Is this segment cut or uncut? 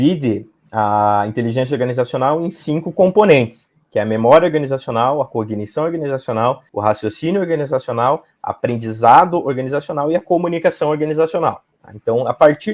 uncut